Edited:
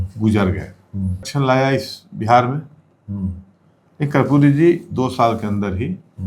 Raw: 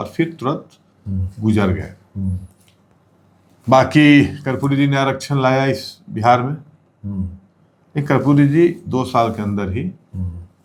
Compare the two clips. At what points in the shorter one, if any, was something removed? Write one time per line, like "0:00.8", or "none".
0:01.3